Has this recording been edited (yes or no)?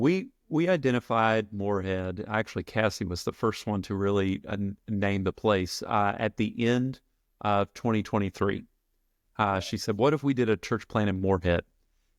no